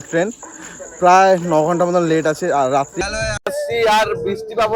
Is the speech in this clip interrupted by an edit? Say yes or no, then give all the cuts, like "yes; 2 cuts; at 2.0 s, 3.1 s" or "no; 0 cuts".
yes; 1 cut; at 3.0 s